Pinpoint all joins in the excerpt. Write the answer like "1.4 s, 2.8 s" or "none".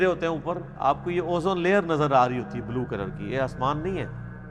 none